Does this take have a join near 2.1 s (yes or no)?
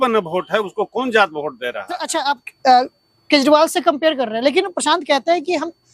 yes